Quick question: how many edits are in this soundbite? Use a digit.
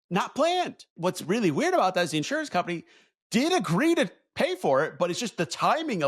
1